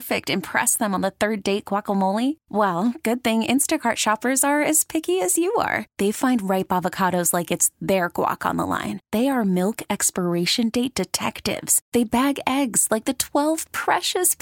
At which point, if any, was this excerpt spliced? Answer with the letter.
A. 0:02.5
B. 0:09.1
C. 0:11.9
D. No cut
D